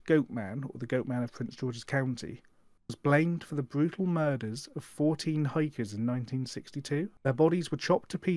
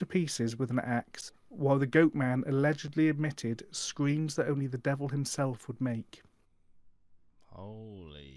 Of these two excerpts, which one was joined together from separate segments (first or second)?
first